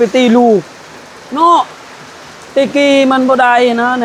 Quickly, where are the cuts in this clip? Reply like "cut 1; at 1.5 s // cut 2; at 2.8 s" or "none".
none